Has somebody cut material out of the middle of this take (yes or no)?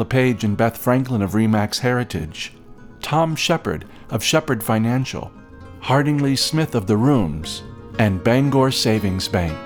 no